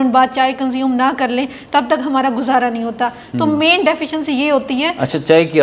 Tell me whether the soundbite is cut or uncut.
uncut